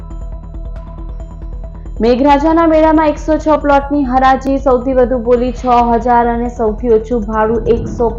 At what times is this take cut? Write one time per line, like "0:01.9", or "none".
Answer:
0:00.9